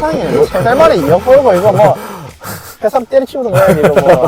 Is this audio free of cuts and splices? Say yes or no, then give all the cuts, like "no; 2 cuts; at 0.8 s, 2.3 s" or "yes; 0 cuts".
yes; 0 cuts